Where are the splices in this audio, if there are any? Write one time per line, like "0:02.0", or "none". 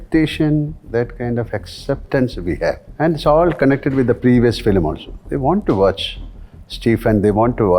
0:02.9